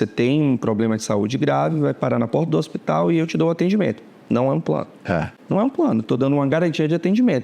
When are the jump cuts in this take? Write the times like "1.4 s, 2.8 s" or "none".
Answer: 5.3 s